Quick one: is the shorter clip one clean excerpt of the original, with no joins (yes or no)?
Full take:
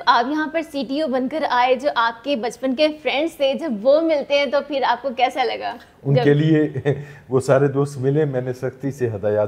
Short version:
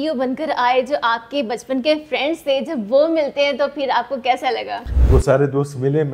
no